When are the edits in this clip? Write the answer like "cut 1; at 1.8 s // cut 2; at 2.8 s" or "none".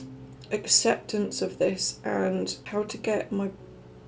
cut 1; at 2.6 s